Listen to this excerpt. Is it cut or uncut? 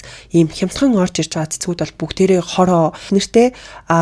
cut